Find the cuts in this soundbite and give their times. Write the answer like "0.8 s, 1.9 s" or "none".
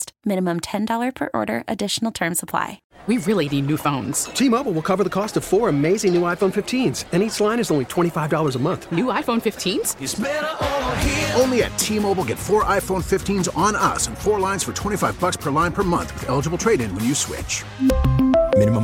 2.8 s